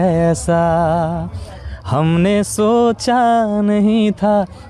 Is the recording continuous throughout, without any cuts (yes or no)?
yes